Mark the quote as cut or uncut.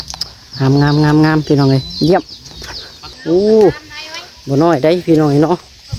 cut